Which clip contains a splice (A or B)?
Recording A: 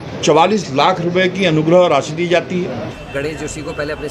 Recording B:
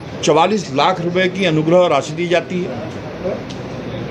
A